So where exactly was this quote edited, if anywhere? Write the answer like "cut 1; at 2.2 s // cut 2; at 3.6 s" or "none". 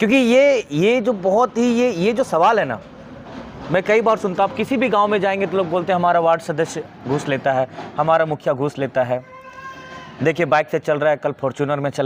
none